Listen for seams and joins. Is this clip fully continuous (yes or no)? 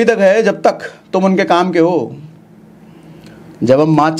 yes